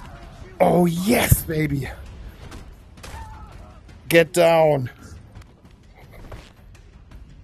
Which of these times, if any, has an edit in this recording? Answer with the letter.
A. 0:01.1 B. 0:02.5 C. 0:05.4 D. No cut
C